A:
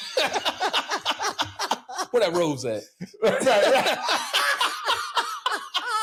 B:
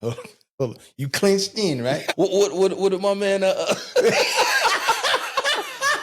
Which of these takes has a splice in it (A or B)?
B